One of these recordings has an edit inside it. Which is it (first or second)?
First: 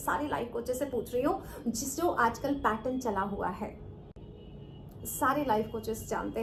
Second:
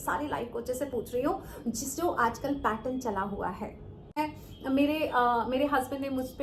second